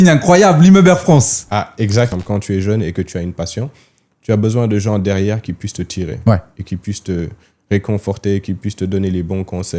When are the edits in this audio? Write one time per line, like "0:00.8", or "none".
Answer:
0:02.1